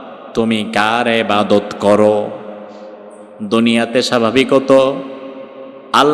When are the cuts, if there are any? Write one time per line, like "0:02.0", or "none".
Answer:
none